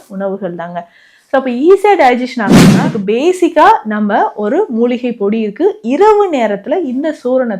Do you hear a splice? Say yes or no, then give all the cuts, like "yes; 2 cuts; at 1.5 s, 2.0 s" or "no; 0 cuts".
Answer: yes; 1 cut; at 2.7 s